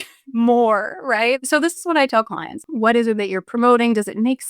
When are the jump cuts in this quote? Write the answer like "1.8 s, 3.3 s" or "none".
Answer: 1.4 s, 2.6 s